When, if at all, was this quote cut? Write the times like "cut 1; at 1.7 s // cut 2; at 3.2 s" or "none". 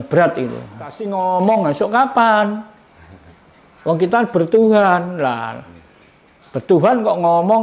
cut 1; at 1.0 s